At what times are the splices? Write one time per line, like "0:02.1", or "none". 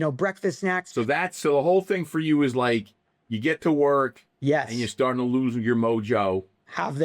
0:00.9